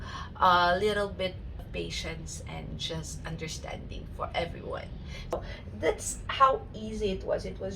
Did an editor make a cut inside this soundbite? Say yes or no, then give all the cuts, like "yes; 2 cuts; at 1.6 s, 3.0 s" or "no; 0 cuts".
yes; 2 cuts; at 1.7 s, 5.3 s